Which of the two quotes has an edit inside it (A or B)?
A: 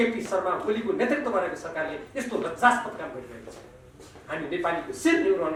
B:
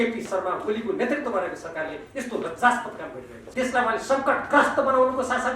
B